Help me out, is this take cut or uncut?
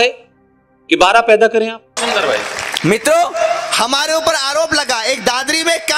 cut